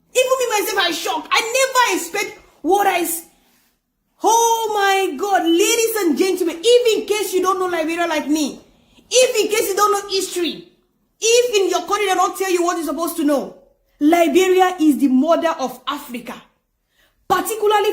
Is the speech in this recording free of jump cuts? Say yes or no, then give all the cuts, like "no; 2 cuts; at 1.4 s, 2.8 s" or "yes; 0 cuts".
no; 1 cut; at 12.0 s